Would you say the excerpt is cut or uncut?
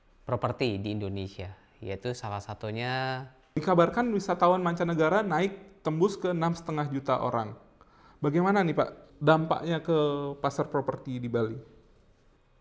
cut